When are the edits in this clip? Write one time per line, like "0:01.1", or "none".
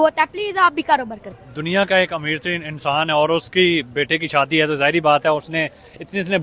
0:01.2